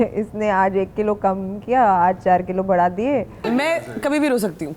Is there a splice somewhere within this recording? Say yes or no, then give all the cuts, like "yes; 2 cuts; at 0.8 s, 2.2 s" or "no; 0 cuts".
yes; 1 cut; at 3.5 s